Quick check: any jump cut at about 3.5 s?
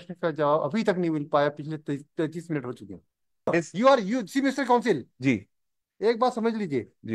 yes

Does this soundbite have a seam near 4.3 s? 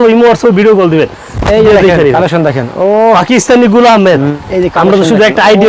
yes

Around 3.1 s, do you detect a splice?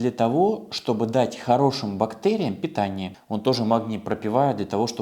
yes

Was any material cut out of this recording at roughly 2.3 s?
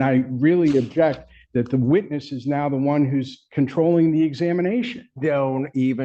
no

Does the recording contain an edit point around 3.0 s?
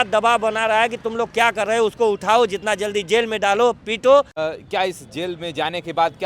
no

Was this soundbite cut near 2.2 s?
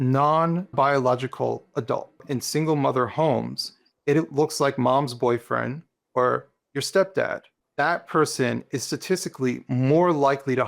yes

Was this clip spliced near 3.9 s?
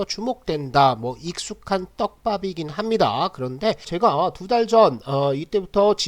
yes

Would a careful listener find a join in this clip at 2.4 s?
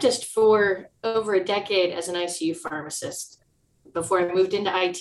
no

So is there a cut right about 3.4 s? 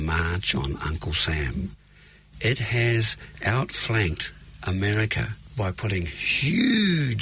yes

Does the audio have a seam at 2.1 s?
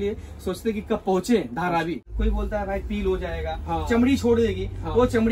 yes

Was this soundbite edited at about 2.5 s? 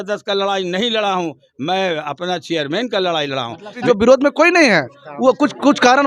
no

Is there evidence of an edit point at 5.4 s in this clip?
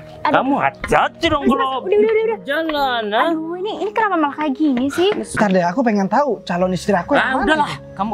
yes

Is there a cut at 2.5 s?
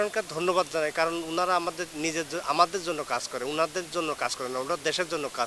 no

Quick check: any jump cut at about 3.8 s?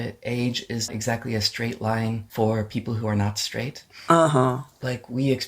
yes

